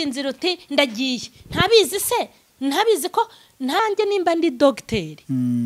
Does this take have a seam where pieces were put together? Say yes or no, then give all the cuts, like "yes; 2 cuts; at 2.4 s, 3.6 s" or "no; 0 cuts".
yes; 1 cut; at 3.8 s